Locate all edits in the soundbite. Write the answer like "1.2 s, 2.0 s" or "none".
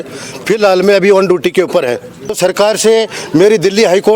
2.4 s